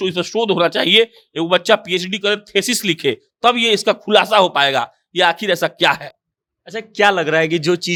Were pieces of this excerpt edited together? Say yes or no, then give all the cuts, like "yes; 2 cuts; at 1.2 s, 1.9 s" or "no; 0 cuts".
no; 0 cuts